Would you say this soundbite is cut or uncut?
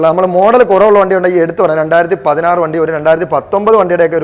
uncut